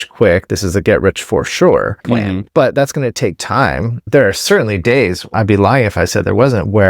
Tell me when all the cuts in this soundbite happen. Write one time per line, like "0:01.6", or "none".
0:02.1
0:04.1
0:05.3